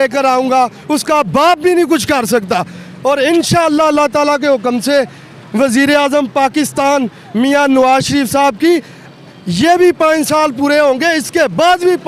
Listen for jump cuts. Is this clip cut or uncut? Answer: uncut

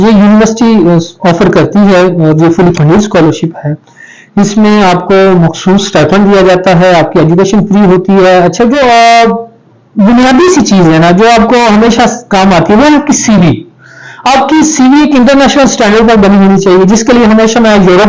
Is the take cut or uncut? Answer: cut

